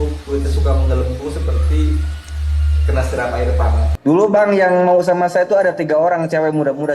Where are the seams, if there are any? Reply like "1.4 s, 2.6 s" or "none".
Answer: 3.9 s